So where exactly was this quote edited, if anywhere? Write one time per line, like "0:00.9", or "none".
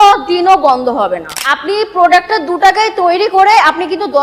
0:01.4